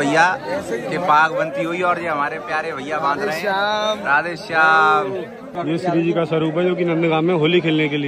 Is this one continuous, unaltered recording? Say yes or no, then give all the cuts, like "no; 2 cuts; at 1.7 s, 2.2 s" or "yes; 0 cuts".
no; 1 cut; at 5.4 s